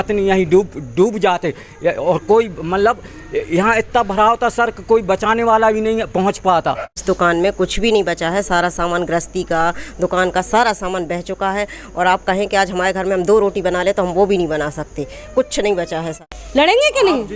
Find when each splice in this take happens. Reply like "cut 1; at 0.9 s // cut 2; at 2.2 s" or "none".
cut 1; at 7.0 s // cut 2; at 16.3 s